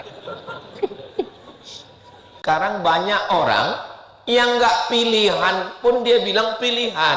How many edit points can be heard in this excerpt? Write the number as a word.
one